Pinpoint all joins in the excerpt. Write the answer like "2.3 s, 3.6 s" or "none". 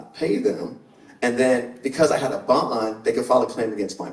none